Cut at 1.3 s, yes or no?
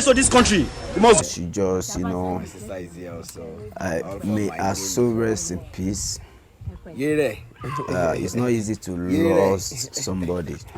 yes